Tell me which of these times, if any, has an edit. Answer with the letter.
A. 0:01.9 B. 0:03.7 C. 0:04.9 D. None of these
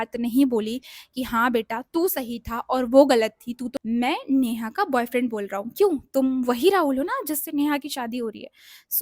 B